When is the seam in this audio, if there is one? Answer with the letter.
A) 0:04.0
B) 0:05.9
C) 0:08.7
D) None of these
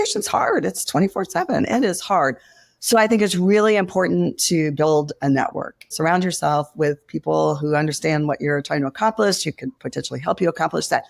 B